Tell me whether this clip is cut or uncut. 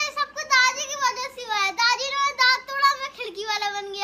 uncut